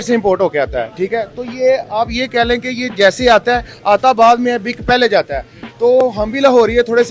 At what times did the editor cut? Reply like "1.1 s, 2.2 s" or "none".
none

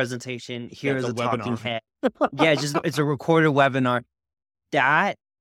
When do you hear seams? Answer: none

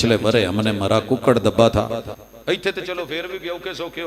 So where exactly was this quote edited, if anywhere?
2.2 s

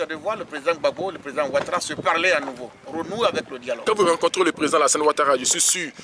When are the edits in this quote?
3.8 s

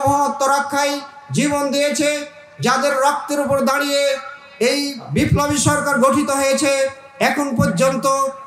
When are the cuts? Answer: 5.1 s

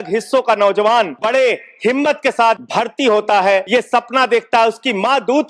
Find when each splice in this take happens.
1.1 s, 2.6 s, 3.7 s

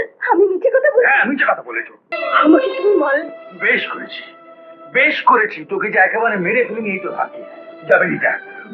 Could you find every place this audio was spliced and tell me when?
2.1 s

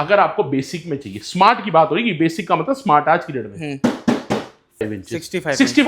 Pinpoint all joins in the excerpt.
4.8 s

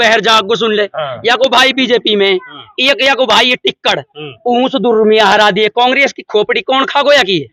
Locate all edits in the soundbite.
none

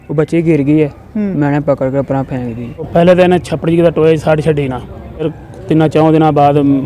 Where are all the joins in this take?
2.9 s, 5.4 s

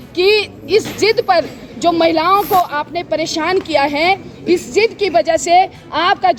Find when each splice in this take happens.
none

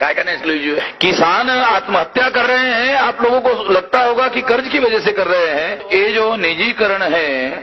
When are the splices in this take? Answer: 0.9 s, 5.8 s

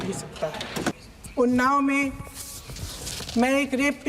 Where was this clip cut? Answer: 1.0 s

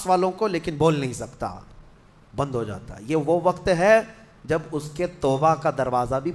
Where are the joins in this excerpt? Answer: none

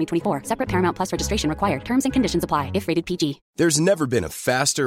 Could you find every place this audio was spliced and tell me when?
3.4 s

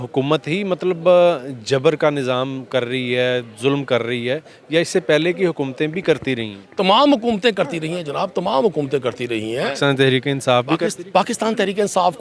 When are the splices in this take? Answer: none

